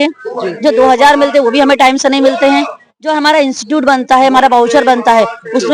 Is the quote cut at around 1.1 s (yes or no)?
no